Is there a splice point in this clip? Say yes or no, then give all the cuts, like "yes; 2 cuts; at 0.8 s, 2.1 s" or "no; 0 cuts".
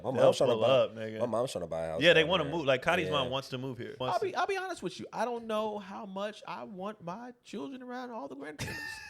yes; 1 cut; at 4.0 s